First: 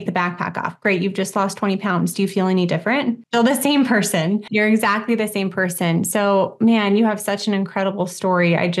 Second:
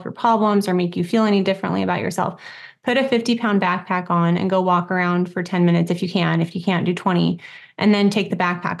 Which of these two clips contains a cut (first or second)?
first